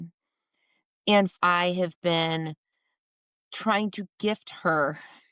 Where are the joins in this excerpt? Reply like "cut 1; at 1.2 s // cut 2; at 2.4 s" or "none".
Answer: cut 1; at 1.3 s